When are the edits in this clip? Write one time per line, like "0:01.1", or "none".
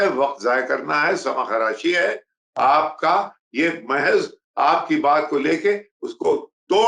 none

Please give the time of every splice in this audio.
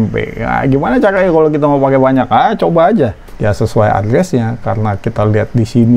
0:03.3

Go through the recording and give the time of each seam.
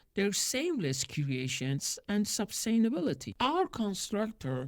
0:03.3

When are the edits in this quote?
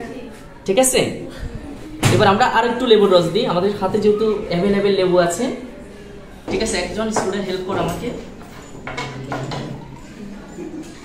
0:06.4

